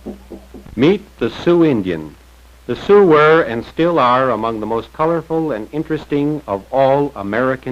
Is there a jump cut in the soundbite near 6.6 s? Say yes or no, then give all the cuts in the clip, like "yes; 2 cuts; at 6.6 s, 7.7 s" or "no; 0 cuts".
yes; 1 cut; at 6.6 s